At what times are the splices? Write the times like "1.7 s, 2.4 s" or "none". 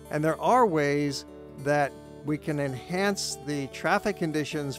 none